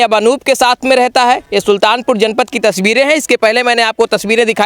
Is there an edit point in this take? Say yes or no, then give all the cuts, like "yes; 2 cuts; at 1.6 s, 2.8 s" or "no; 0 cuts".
no; 0 cuts